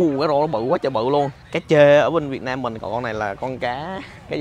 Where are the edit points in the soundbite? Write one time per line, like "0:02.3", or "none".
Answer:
0:01.5
0:02.8